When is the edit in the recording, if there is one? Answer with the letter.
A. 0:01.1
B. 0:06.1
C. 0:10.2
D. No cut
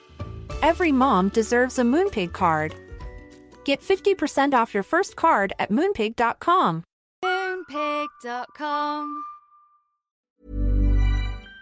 C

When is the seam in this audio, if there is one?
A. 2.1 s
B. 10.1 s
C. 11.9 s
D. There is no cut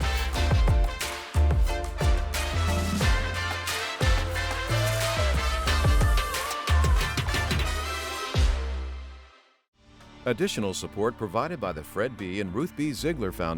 B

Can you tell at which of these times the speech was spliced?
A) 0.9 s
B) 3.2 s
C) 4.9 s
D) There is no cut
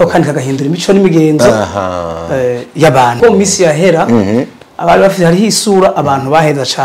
B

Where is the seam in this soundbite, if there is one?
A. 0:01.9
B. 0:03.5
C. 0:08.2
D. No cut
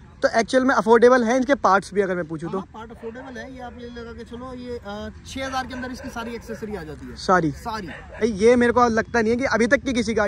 C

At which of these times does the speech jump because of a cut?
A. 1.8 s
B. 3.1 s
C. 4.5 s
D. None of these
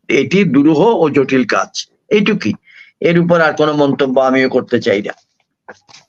D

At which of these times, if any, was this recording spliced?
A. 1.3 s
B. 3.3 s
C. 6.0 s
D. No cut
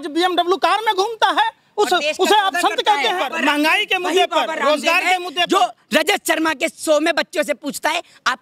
B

